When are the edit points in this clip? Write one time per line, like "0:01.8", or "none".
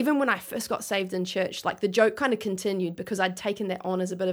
none